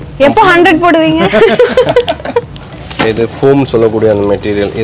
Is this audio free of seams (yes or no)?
no